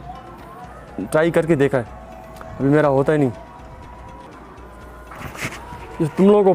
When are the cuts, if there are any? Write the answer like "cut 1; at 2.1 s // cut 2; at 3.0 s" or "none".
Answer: none